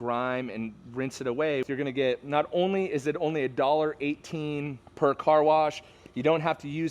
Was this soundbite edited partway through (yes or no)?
yes